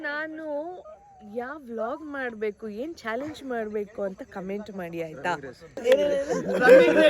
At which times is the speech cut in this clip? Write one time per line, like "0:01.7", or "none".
0:05.8